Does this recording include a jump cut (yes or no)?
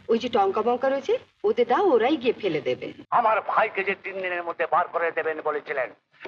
yes